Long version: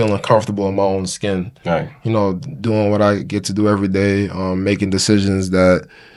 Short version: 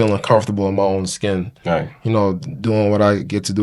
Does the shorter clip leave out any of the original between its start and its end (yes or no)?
no